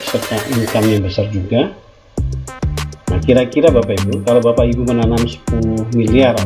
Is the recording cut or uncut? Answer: cut